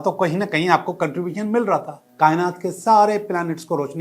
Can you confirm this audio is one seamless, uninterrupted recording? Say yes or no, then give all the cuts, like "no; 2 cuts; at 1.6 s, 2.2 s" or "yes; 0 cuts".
no; 1 cut; at 2.0 s